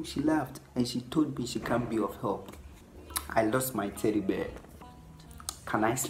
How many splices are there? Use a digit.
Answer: 1